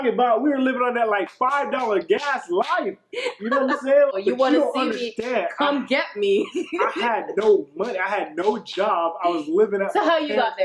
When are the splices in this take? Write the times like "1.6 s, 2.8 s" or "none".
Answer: 4.1 s